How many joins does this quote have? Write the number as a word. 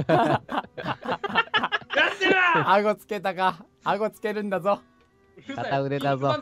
zero